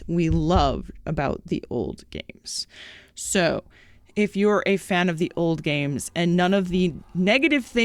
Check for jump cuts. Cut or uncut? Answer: uncut